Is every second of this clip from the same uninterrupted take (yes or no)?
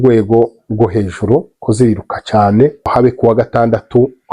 no